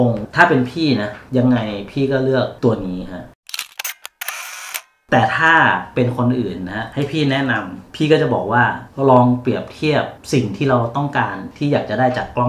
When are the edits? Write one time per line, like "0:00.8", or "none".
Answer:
0:03.2
0:05.0